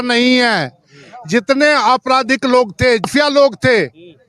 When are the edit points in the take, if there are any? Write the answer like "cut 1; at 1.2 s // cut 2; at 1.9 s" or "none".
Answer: cut 1; at 3.1 s